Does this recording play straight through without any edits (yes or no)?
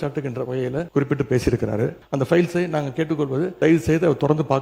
no